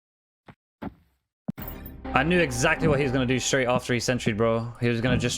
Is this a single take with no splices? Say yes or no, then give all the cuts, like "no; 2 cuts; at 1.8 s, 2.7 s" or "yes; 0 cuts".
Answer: no; 1 cut; at 2.0 s